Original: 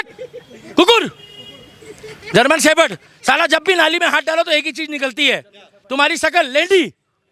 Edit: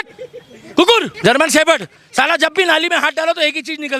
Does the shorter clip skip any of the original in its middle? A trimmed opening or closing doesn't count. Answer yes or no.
yes